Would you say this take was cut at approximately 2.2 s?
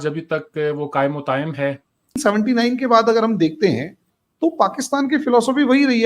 yes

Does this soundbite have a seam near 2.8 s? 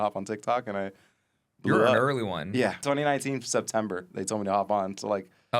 yes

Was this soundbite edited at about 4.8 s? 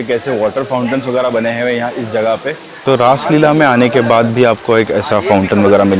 no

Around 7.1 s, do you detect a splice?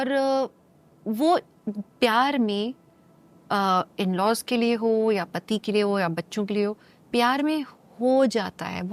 no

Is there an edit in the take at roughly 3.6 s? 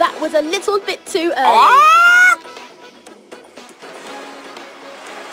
no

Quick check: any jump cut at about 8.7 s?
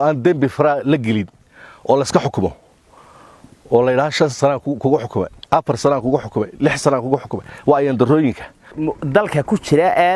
yes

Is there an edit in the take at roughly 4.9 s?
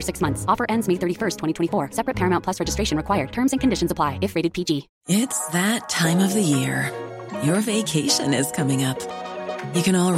yes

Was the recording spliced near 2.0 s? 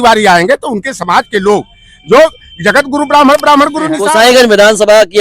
no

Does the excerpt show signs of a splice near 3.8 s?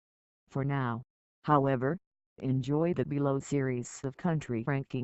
no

